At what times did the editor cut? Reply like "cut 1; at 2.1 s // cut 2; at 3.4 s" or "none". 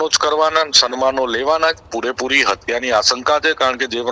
cut 1; at 1.9 s

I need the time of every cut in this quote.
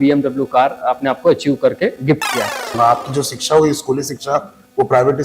cut 1; at 2.6 s

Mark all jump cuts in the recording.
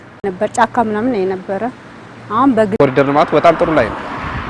cut 1; at 2.8 s

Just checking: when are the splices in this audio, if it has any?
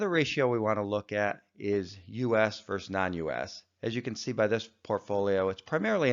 cut 1; at 2.4 s

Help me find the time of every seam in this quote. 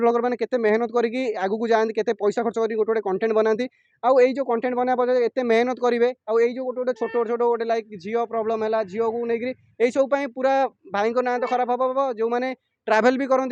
none

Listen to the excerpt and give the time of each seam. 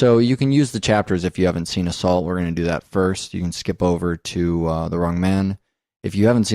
cut 1; at 2.9 s

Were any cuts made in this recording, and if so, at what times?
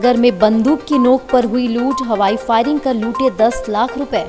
none

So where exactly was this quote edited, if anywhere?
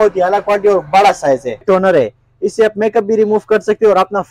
cut 1; at 1.6 s

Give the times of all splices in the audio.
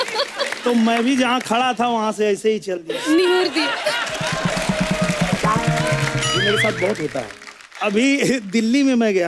none

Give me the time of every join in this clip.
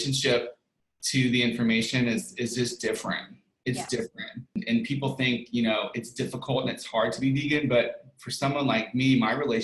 cut 1; at 4.6 s

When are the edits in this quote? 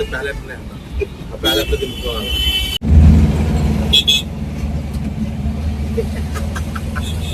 cut 1; at 2.7 s

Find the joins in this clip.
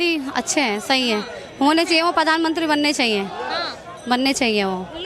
none

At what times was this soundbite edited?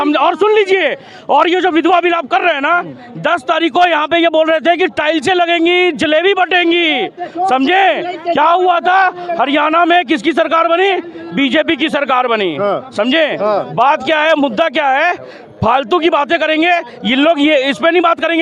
none

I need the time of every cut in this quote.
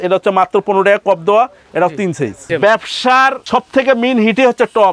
cut 1; at 2.5 s // cut 2; at 3.4 s

